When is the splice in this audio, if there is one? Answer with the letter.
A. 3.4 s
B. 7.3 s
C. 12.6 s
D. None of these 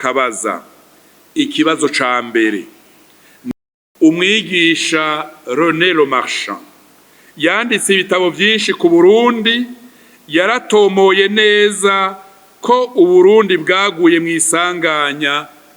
A